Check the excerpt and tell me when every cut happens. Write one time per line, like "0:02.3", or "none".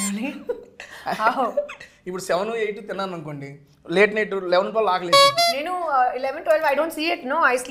none